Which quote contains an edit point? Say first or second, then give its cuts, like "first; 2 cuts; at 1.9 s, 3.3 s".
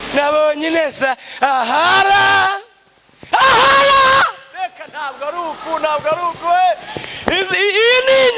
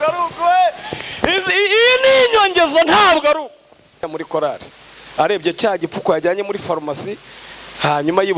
second; 1 cut; at 4.0 s